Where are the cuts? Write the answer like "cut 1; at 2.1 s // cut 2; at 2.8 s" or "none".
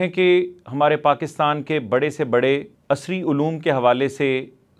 cut 1; at 2.7 s